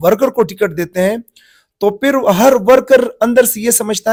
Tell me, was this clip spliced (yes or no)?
no